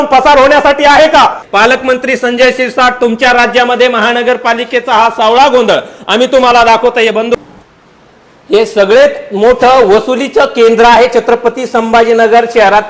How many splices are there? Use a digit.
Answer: 2